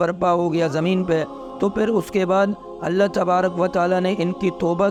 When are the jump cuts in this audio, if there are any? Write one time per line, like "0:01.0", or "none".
none